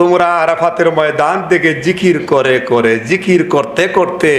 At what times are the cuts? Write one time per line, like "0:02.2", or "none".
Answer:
none